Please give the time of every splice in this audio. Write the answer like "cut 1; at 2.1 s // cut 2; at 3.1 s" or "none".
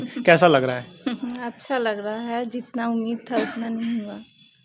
none